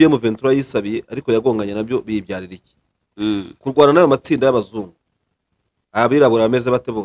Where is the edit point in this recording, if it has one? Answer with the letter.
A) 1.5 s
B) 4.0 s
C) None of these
C